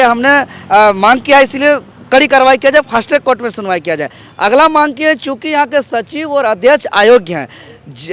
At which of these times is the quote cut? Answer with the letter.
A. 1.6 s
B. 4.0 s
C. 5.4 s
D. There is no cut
D